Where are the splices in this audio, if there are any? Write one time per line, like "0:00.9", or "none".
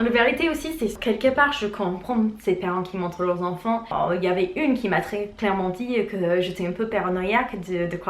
0:01.0
0:03.9